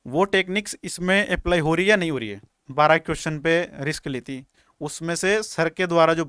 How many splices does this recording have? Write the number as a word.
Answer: one